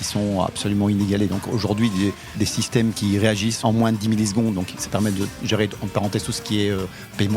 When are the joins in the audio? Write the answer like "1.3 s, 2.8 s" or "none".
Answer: 2.2 s